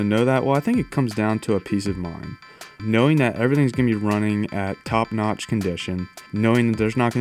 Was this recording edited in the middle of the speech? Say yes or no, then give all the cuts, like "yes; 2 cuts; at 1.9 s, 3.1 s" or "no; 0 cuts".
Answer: yes; 2 cuts; at 2.8 s, 6.2 s